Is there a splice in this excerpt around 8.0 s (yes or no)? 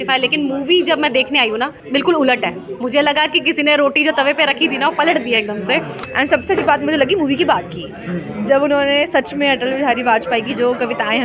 no